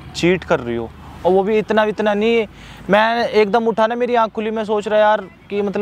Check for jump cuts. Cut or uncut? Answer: uncut